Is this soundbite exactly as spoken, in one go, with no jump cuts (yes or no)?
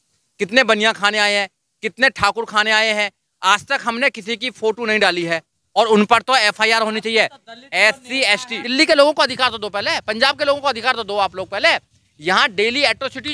no